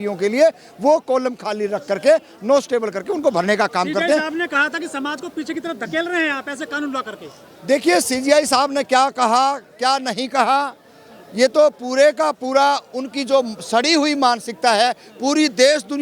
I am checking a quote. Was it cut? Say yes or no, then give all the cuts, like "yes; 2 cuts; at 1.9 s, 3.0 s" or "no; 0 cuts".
no; 0 cuts